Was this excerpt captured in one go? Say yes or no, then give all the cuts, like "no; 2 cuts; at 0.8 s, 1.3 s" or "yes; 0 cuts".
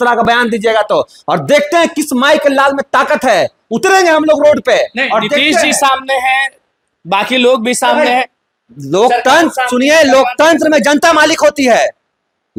yes; 0 cuts